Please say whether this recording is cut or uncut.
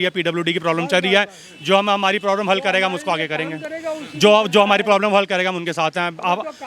uncut